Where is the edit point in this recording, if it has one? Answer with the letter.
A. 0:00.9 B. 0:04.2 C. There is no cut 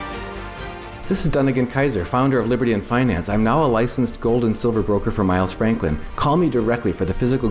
A